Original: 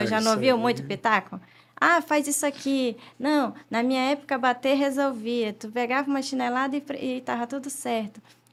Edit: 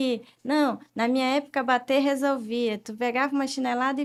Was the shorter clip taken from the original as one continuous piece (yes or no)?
yes